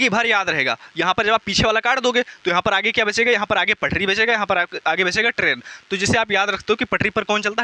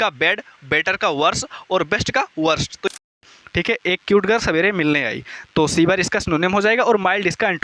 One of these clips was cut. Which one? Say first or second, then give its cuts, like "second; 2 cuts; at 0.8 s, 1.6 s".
second; 1 cut; at 3.0 s